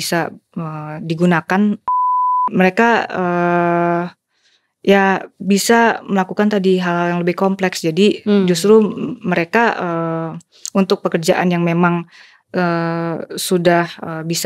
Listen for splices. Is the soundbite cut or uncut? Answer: cut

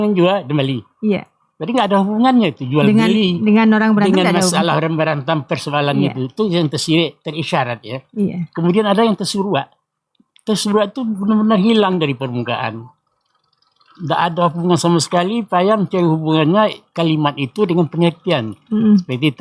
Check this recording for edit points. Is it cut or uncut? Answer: uncut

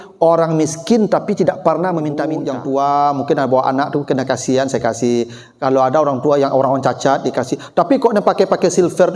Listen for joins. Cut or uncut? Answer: cut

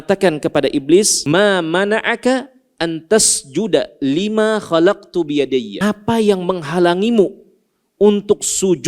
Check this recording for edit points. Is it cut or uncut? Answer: cut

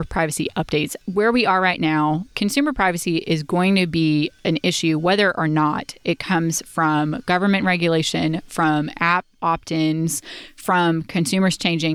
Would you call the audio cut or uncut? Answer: cut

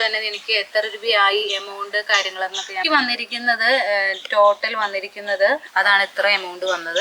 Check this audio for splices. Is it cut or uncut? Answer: cut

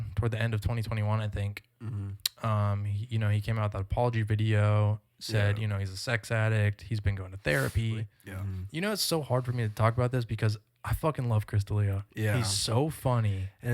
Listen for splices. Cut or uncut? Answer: cut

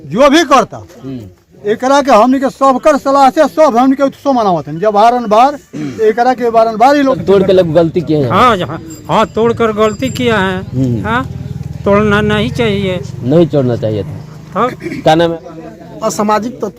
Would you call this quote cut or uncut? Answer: cut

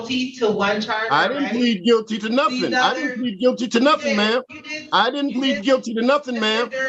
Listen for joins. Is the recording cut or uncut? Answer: uncut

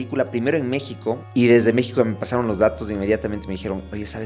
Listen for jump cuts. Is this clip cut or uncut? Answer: cut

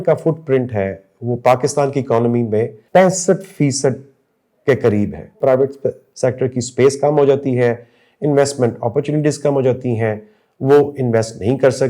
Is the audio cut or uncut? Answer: cut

